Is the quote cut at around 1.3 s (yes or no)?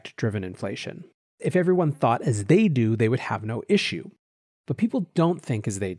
yes